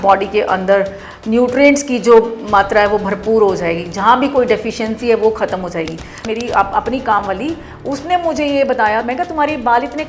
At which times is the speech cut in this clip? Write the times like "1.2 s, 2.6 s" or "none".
6.3 s, 9.0 s